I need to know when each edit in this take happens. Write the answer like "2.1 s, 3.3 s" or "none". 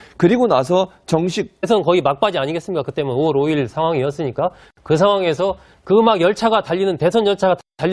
none